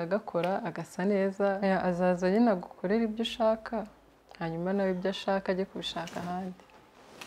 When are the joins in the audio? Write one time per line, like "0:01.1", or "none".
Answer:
0:01.6